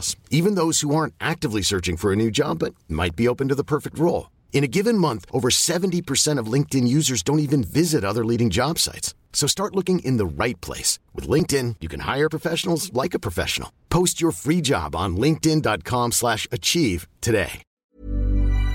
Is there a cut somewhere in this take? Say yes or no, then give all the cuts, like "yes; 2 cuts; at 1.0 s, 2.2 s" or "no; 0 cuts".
yes; 1 cut; at 17.7 s